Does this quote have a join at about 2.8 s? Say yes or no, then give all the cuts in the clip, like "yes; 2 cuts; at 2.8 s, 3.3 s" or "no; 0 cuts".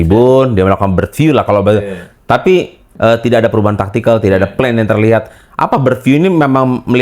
yes; 1 cut; at 2.8 s